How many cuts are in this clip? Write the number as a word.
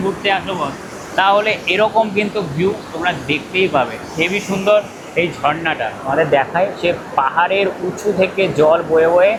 zero